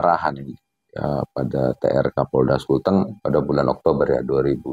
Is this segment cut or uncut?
cut